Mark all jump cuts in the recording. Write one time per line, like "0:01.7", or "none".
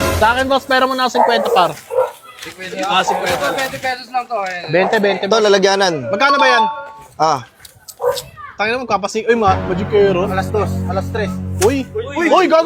none